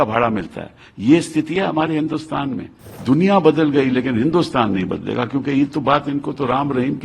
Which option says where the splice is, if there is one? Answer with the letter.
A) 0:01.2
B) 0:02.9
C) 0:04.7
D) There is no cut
B